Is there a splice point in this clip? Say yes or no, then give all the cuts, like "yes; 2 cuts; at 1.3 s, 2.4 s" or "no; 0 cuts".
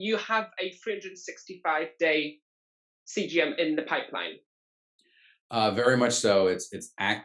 no; 0 cuts